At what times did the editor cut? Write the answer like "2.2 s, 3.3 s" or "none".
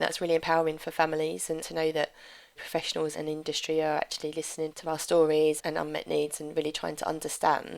1.6 s, 3.1 s, 5.6 s